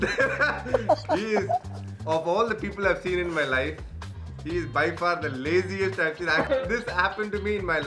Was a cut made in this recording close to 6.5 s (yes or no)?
yes